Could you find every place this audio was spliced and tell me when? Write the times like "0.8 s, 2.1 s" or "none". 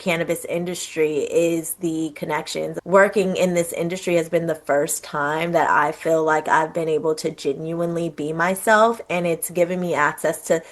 2.7 s